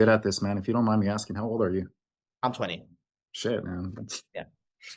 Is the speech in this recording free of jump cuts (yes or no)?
yes